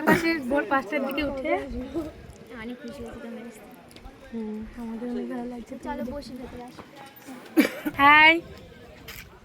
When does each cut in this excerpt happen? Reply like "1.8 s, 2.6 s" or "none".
7.9 s

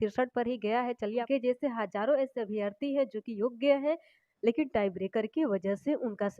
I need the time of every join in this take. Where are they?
1.3 s

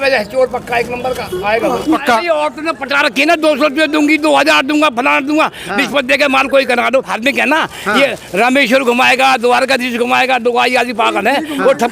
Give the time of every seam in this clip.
2.0 s, 7.1 s

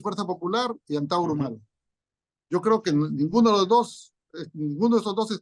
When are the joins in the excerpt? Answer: none

